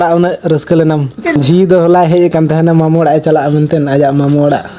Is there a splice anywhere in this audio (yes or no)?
yes